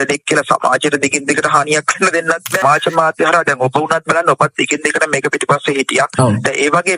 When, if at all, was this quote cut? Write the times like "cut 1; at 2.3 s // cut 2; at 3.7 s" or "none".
cut 1; at 2.6 s